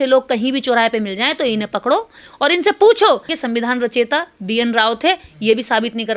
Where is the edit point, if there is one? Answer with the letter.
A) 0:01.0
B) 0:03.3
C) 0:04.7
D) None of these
B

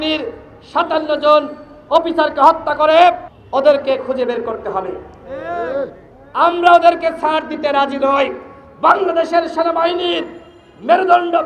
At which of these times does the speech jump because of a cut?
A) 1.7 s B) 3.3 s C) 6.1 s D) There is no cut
B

